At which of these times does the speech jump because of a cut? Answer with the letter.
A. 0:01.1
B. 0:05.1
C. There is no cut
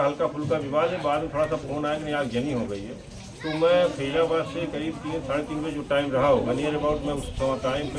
C